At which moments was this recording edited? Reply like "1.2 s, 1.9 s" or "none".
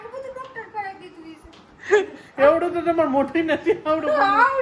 none